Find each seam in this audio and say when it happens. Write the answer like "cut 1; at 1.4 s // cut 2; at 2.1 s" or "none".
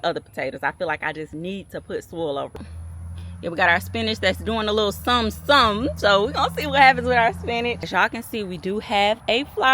cut 1; at 2.6 s // cut 2; at 7.9 s